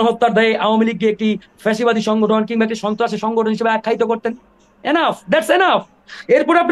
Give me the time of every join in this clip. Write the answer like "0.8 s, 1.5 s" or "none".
none